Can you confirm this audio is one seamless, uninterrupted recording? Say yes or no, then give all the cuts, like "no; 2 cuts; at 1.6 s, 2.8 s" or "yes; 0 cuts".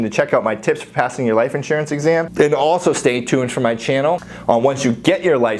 no; 2 cuts; at 2.3 s, 4.3 s